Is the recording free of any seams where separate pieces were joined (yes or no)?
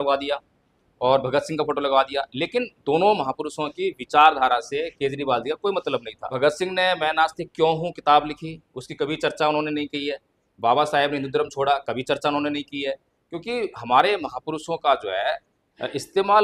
no